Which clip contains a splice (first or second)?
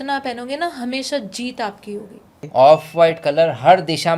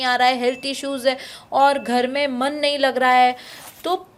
first